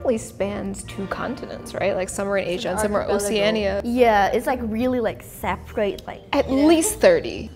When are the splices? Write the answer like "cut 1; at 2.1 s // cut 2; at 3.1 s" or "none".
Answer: none